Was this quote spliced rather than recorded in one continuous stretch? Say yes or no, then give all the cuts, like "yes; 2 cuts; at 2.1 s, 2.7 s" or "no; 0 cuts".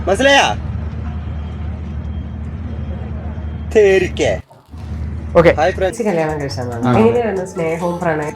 yes; 1 cut; at 6.0 s